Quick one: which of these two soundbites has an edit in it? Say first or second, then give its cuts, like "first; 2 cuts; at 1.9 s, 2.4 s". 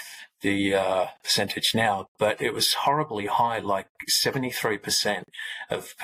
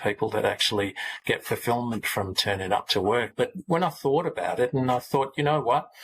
second; 1 cut; at 3.3 s